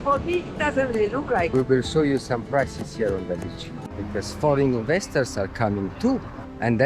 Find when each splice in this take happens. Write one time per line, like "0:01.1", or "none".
0:01.5
0:04.0